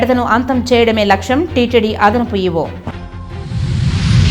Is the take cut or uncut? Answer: uncut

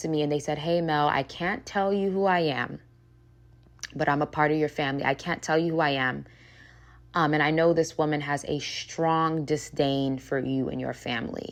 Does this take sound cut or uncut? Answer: uncut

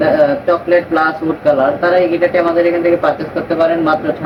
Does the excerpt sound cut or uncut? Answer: uncut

